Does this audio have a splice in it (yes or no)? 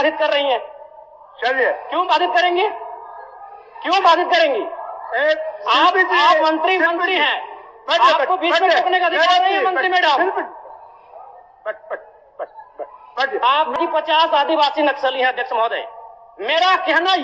yes